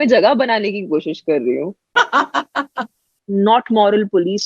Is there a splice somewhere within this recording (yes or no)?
yes